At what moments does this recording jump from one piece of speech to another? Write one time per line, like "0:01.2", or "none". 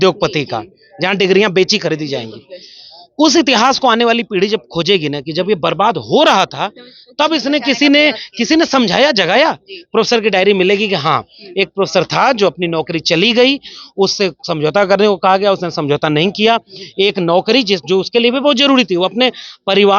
none